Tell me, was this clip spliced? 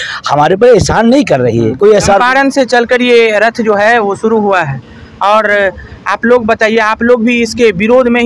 no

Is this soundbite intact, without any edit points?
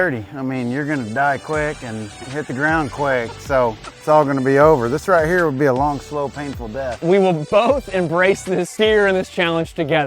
no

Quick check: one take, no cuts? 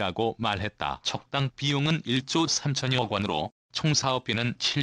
no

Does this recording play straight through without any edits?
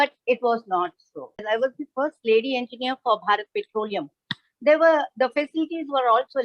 no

